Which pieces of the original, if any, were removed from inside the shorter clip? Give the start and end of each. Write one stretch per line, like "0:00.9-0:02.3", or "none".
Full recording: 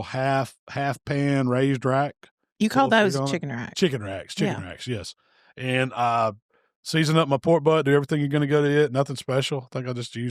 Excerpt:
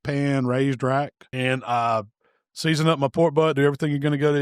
0:02.2-0:05.5